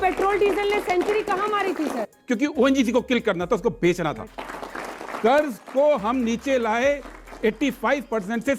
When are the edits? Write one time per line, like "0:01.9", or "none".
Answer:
0:02.1
0:04.5